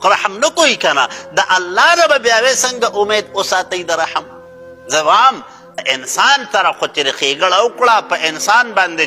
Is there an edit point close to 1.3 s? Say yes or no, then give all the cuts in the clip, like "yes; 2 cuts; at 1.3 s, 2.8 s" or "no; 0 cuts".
no; 1 cut; at 5.8 s